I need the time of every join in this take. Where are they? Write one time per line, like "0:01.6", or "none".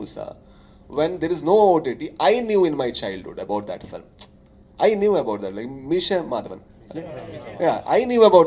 none